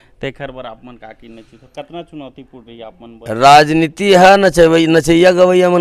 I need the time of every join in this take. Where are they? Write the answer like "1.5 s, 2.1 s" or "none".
none

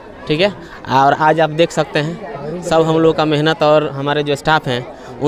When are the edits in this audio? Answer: none

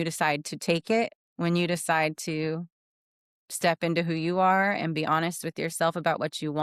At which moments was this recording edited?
none

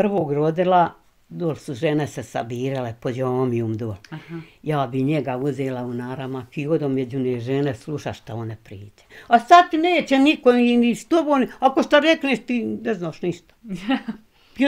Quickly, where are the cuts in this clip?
none

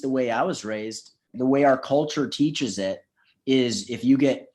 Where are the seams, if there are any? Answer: 1.3 s

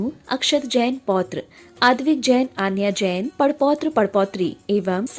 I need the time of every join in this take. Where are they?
none

